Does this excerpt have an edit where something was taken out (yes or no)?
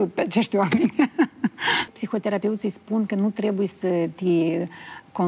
yes